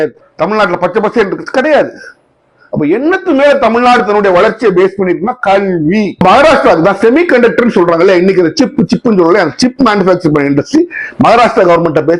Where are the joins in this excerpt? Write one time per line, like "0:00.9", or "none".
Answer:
0:06.2